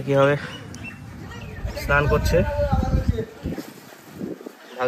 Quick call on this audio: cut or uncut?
uncut